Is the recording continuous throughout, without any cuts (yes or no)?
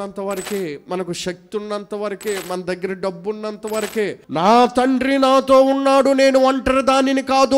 no